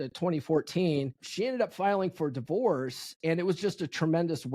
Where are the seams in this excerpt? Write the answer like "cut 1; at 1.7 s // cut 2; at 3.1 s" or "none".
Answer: cut 1; at 1.2 s